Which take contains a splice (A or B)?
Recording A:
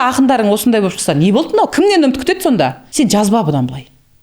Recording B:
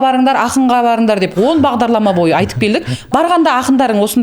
A